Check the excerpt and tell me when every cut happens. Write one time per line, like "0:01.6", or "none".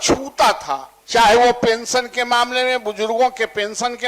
0:00.9